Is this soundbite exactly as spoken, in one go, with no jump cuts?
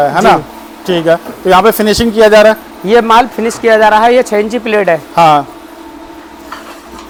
yes; 0 cuts

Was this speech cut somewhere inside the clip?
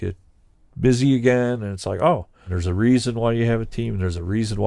yes; 1 cut; at 2.6 s

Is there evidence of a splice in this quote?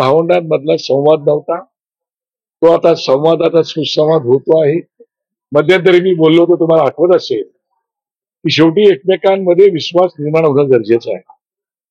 no; 0 cuts

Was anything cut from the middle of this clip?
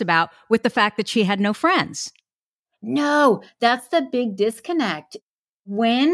yes; 1 cut; at 5.1 s

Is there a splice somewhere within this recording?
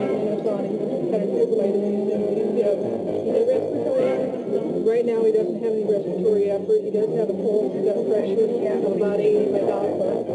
yes; 1 cut; at 9.3 s

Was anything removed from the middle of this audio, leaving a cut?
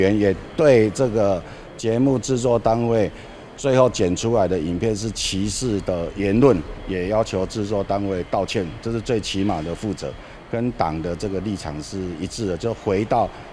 no; 0 cuts

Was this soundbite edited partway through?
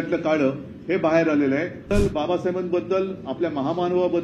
yes; 1 cut; at 1.9 s

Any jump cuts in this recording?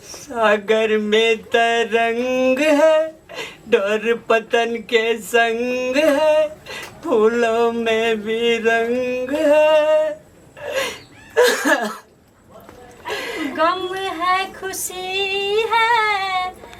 no; 0 cuts

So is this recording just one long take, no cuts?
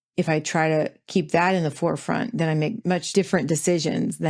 no; 1 cut; at 2.8 s

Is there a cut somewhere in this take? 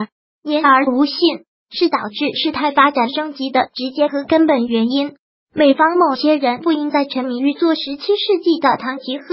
yes; 1 cut; at 5.4 s

